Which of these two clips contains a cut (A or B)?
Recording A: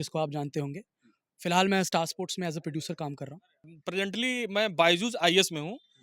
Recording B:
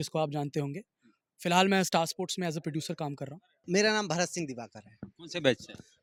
A